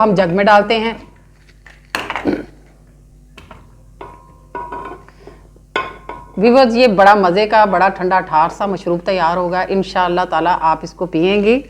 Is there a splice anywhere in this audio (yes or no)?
no